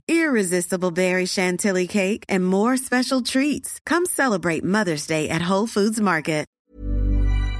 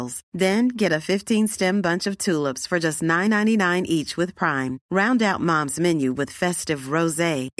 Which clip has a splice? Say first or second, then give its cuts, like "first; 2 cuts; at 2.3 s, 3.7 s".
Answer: first; 1 cut; at 6.5 s